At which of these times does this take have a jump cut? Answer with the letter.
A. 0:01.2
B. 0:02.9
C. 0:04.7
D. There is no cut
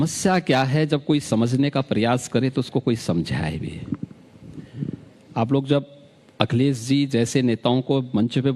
C